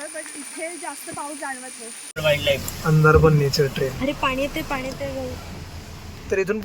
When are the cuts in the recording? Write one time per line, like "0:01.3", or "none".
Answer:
0:02.2